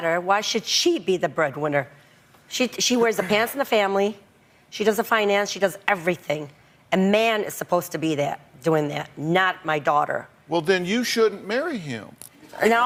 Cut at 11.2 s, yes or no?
no